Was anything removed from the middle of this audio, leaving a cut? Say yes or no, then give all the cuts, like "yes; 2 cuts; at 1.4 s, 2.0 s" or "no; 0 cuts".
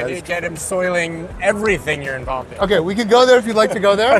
yes; 1 cut; at 2.5 s